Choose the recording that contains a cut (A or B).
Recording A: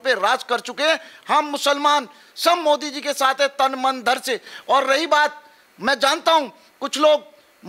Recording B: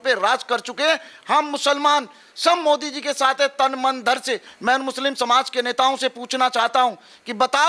B